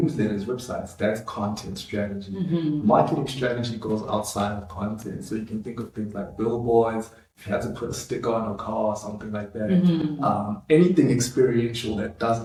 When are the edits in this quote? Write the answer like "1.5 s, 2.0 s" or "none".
none